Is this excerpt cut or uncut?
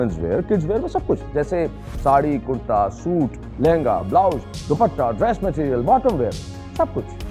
uncut